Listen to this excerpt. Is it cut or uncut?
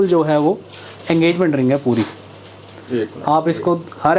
uncut